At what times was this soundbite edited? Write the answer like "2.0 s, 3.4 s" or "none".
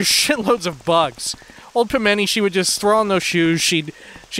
none

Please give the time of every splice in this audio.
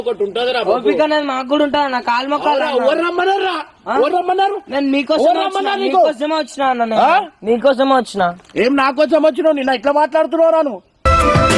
none

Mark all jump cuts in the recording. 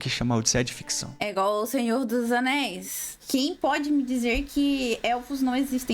1.2 s, 3.2 s

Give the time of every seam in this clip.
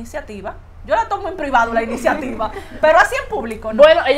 none

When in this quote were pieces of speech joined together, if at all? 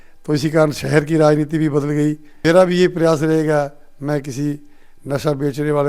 2.3 s

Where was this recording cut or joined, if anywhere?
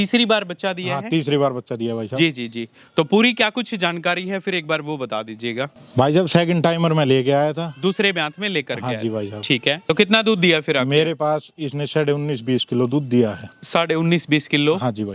5.8 s, 9.8 s

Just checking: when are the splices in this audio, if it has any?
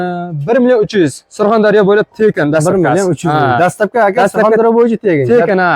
none

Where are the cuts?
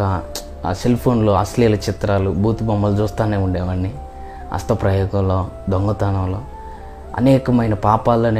none

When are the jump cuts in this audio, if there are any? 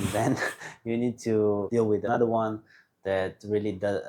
1.9 s

